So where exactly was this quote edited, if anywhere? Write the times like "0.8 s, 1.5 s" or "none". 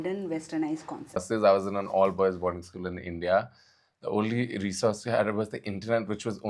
1.2 s